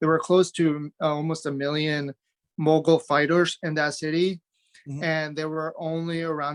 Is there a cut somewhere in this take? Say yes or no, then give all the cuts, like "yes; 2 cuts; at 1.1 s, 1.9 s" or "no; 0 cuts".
no; 0 cuts